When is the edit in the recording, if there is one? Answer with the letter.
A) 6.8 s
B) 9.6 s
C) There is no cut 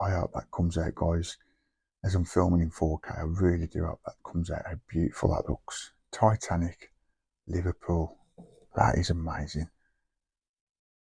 C